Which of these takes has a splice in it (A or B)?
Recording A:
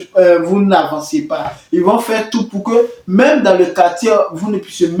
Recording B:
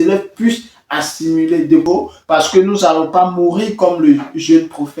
B